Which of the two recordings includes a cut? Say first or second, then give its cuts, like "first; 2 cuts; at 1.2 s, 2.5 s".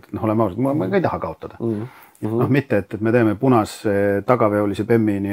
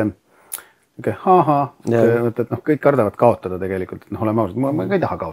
first; 1 cut; at 2.3 s